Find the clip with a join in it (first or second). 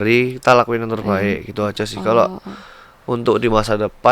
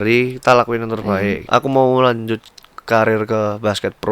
second